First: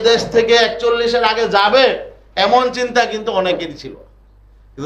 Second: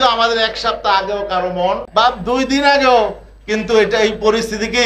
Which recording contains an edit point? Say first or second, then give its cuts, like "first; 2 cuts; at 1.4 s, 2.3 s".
second; 1 cut; at 1.8 s